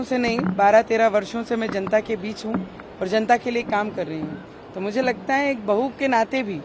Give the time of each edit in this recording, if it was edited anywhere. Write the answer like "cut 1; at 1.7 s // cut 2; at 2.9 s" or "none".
none